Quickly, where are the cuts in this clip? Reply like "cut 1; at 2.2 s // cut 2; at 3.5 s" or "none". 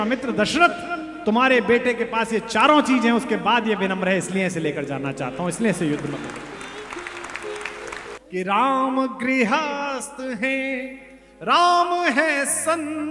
cut 1; at 8.1 s